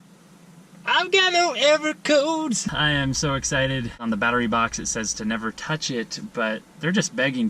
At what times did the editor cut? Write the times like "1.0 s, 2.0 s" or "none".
2.7 s, 4.0 s